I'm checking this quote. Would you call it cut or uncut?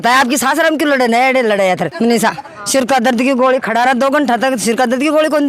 cut